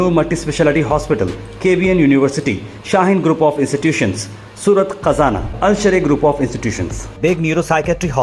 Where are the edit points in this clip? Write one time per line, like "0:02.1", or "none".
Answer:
none